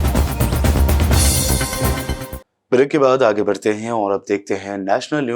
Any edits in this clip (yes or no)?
no